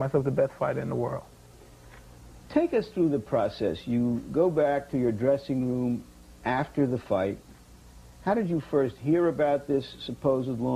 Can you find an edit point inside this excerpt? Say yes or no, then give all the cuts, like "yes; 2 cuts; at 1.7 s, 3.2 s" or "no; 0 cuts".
no; 0 cuts